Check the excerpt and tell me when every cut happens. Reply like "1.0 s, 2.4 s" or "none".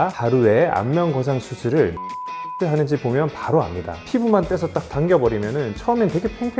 3.9 s